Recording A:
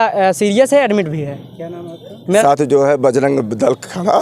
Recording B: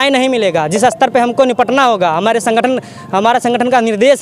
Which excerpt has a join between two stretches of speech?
A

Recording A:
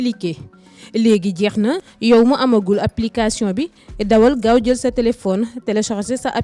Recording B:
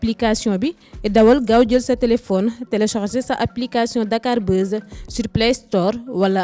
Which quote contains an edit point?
A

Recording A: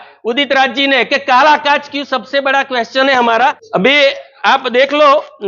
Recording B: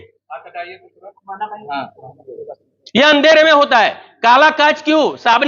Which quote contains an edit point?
A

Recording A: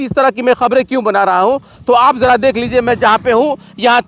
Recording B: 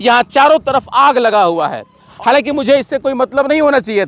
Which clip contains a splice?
B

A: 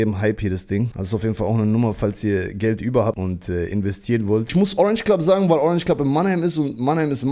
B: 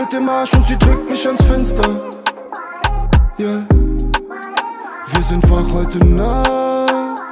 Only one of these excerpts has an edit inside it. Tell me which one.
A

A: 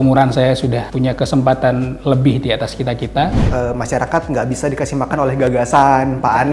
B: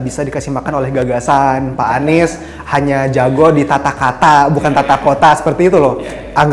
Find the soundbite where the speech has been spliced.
A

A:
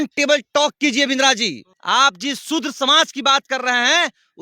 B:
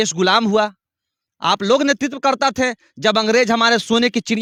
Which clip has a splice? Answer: A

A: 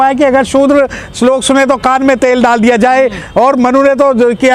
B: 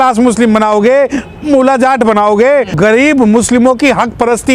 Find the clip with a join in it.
B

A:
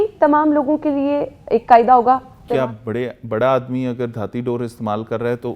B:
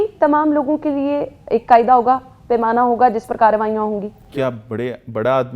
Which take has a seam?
A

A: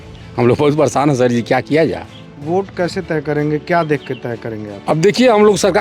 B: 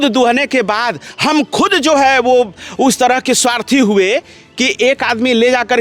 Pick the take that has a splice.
A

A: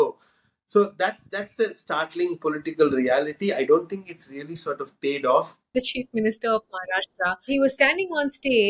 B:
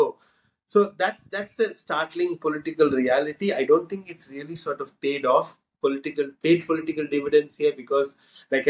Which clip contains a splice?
A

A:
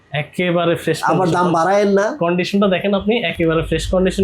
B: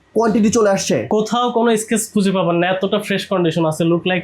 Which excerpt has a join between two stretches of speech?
B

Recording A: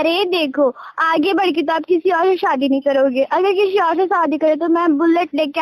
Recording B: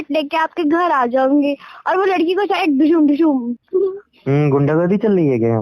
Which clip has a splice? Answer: B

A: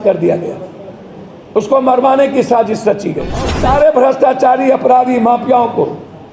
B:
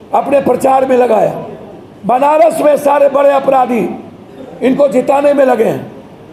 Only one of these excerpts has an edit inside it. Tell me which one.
A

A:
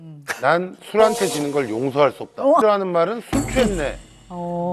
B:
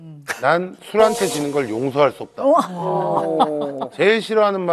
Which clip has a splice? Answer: A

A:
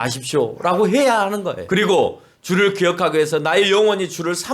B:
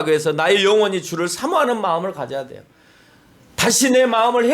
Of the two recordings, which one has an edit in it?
A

